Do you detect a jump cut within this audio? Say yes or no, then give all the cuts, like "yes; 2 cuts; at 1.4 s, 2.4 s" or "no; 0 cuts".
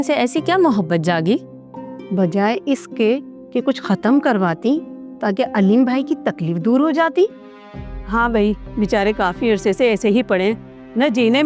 no; 0 cuts